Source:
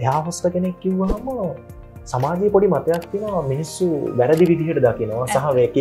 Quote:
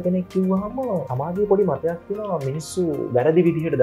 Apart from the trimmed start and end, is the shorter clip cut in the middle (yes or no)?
yes